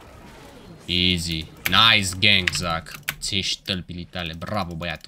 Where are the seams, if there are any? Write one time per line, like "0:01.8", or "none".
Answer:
none